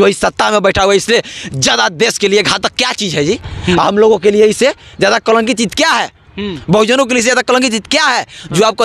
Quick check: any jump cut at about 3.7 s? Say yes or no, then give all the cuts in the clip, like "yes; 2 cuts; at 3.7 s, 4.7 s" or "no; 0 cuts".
no; 0 cuts